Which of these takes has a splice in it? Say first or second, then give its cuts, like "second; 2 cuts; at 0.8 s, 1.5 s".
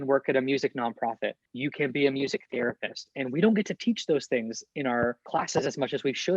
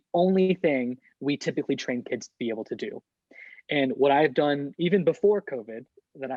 first; 2 cuts; at 1.4 s, 5.3 s